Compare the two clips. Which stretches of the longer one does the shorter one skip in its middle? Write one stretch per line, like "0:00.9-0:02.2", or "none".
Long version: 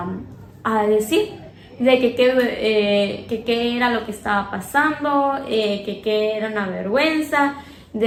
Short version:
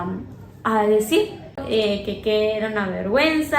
0:01.6-0:05.4